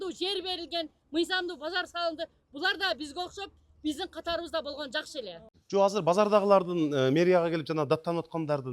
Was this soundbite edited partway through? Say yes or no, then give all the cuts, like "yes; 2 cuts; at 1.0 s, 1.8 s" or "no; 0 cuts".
yes; 1 cut; at 5.5 s